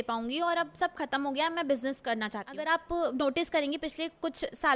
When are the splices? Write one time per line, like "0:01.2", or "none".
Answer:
0:02.5